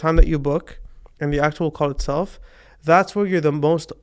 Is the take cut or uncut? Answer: uncut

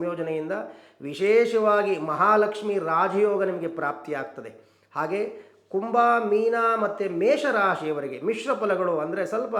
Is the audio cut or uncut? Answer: uncut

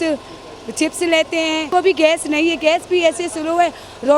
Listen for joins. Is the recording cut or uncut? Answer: cut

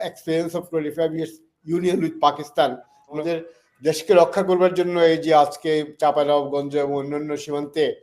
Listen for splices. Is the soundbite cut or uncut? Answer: cut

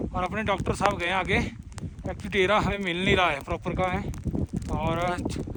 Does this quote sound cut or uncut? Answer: uncut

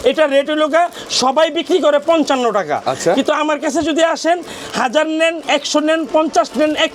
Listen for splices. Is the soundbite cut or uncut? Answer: uncut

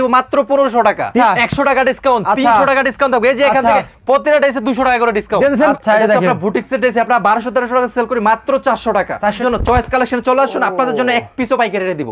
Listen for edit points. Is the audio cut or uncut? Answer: cut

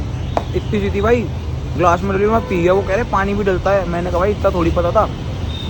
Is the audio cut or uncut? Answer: uncut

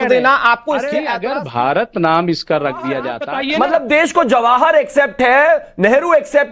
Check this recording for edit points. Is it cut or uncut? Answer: cut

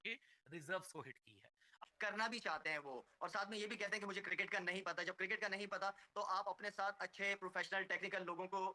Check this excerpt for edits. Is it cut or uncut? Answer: cut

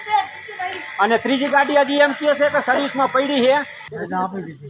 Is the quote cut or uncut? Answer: cut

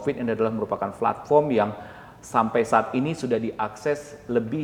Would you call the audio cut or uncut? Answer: uncut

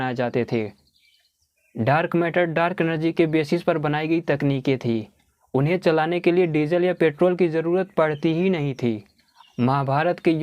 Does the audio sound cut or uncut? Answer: cut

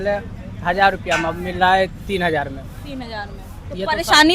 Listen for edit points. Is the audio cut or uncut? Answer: uncut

